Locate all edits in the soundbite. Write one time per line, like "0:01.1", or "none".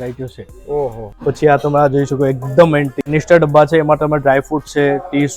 0:01.1
0:03.1